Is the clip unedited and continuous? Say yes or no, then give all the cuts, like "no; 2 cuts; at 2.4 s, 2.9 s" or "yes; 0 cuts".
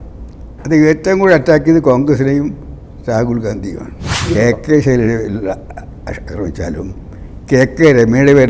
no; 1 cut; at 4.3 s